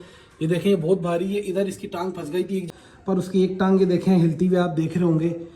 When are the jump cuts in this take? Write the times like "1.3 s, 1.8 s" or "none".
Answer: 2.7 s